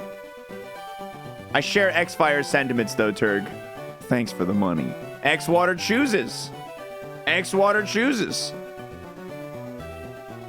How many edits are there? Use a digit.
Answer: 1